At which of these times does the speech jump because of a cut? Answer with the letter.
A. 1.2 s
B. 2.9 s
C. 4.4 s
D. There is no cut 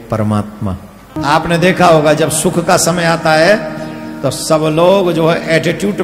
A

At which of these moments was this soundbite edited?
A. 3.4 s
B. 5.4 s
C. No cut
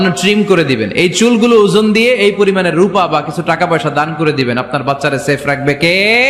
C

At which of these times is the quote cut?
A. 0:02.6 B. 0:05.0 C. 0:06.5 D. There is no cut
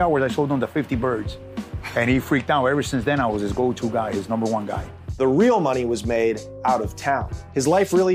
D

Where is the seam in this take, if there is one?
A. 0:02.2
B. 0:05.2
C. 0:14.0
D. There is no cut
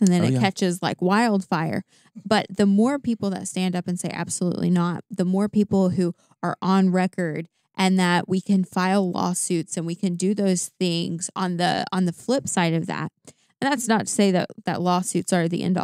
D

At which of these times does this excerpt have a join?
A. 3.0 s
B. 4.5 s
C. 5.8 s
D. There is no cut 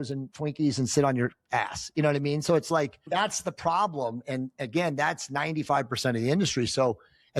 A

